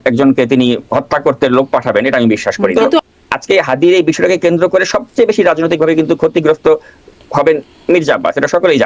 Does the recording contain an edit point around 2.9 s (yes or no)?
yes